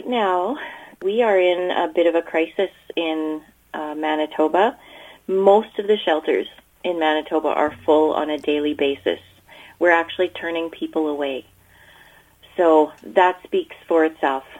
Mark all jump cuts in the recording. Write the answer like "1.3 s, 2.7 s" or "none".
1.0 s